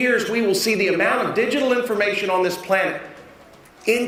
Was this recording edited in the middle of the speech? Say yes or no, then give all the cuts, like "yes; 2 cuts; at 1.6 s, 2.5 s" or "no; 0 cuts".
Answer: no; 0 cuts